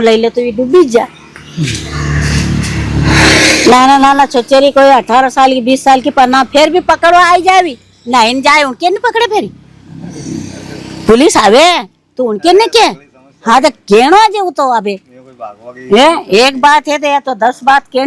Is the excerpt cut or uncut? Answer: uncut